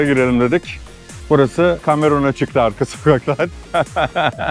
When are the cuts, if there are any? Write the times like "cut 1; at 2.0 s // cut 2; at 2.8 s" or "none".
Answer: none

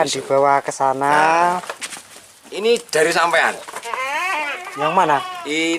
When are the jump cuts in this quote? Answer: cut 1; at 1.7 s

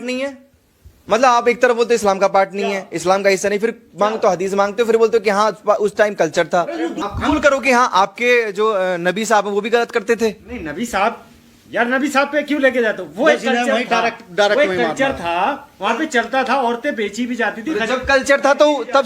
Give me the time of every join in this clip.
cut 1; at 7.0 s

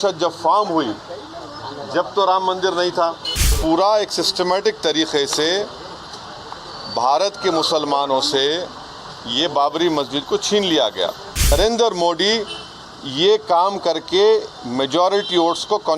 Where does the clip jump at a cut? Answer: cut 1; at 3.6 s // cut 2; at 11.5 s

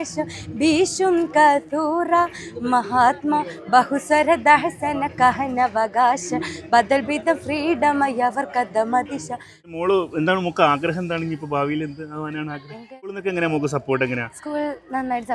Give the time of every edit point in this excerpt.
cut 1; at 9.7 s // cut 2; at 13.2 s

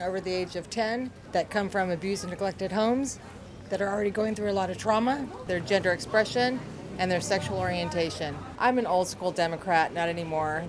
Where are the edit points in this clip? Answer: cut 1; at 1.2 s // cut 2; at 5.5 s // cut 3; at 8.5 s

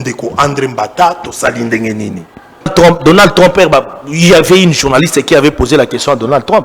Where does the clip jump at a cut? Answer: cut 1; at 2.7 s

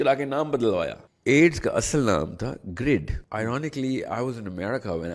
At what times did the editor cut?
cut 1; at 1.1 s // cut 2; at 3.2 s

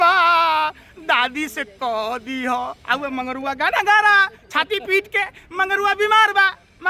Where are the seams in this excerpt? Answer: none

